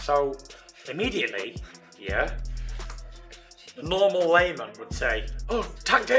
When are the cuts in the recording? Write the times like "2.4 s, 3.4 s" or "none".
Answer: none

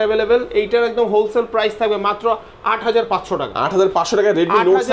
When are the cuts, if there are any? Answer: none

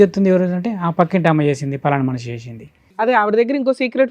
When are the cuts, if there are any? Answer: 3.1 s

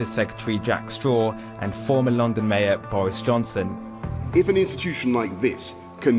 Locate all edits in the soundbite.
5.0 s

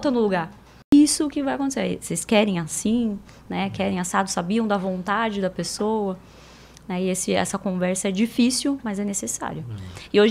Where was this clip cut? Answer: 0.9 s

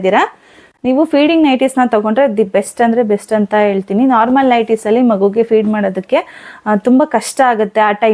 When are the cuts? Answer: none

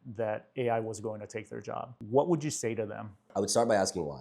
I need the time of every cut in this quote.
1.9 s, 3.3 s

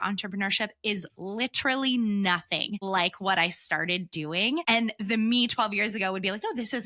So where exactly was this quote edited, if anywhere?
2.8 s, 4.6 s

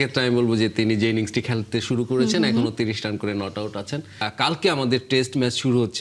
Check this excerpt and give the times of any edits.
4.2 s

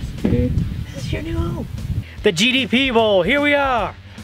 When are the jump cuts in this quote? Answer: 0.8 s, 2.0 s

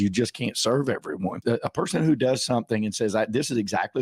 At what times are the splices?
1.4 s

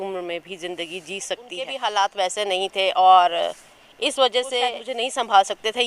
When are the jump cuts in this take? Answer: 1.7 s, 4.8 s

